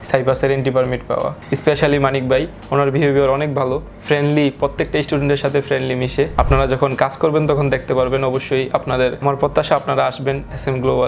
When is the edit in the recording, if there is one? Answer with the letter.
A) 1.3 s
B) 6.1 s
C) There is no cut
A